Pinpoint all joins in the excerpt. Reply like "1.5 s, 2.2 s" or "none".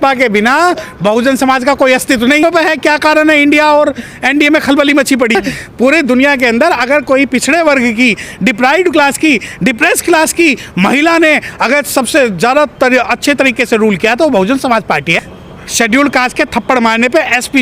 2.4 s, 5.4 s, 15.1 s